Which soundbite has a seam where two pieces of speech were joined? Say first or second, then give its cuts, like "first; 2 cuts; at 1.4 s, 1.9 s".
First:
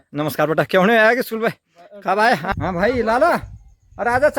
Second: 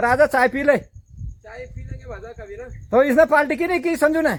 first; 1 cut; at 2.5 s